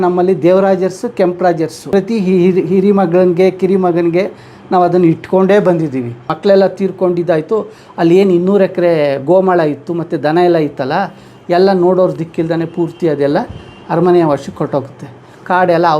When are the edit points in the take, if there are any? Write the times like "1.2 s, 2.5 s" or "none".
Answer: 1.8 s, 6.3 s

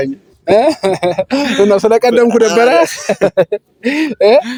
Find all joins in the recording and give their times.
none

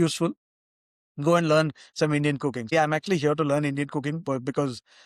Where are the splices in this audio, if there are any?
2.7 s

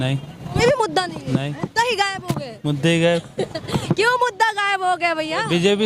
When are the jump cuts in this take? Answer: none

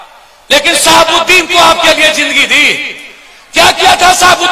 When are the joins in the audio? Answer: none

